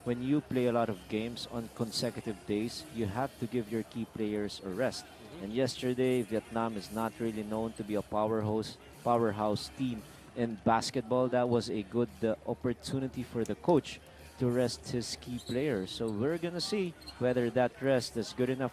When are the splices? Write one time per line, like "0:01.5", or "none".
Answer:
none

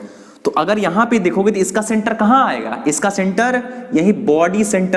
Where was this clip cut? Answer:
none

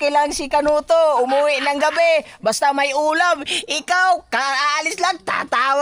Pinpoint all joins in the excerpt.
none

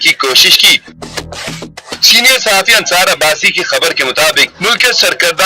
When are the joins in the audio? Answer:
0:02.5

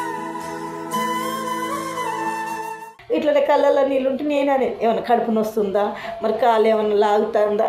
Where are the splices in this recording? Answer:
0:02.9

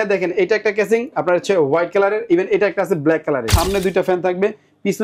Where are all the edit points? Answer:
0:03.5

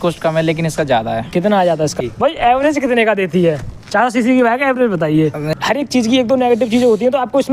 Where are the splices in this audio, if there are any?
0:02.0
0:05.5

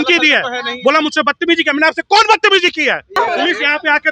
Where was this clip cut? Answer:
0:03.2

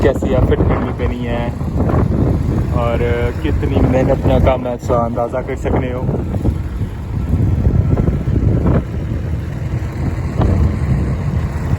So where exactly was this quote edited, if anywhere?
none

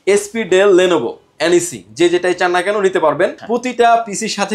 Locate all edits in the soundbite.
0:03.3

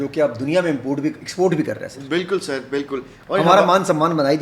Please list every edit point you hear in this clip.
none

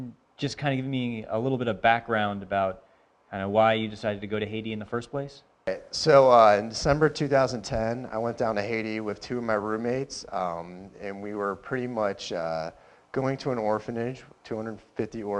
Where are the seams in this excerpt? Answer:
0:07.0

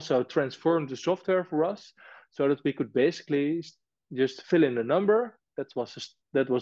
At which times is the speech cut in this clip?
none

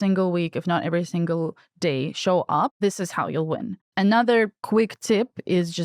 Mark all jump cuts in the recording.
0:02.8
0:03.8
0:04.6

